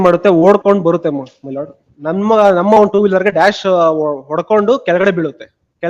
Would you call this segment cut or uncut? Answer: uncut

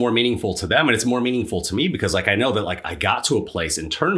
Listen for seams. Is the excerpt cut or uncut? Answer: uncut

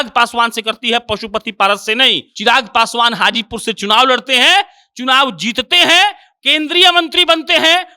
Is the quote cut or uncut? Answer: cut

